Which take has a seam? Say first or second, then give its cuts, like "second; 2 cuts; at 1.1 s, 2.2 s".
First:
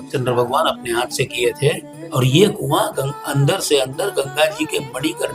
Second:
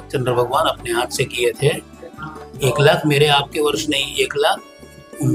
first; 1 cut; at 1.9 s